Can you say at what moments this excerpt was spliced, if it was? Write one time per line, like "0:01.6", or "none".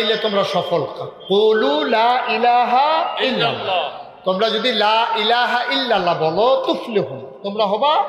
none